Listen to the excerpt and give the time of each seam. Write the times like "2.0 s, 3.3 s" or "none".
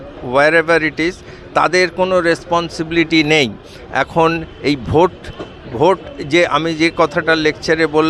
none